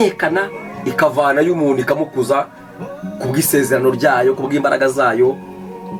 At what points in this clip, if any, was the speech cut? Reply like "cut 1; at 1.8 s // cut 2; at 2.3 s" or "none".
none